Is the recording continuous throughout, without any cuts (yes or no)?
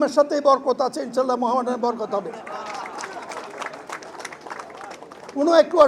yes